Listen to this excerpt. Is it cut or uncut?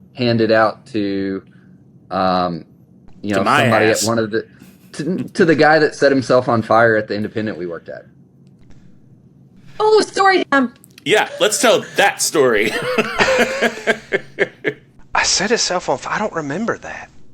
cut